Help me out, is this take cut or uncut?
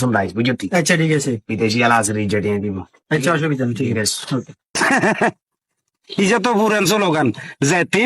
cut